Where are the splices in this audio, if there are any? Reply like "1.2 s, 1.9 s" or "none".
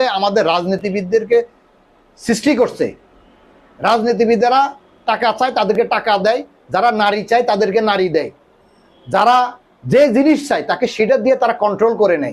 none